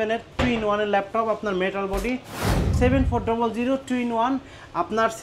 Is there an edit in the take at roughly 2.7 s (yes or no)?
yes